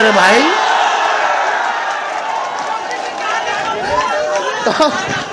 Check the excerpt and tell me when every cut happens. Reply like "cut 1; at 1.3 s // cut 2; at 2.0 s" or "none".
none